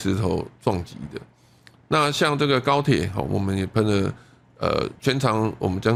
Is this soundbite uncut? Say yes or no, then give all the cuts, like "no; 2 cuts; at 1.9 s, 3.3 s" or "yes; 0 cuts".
yes; 0 cuts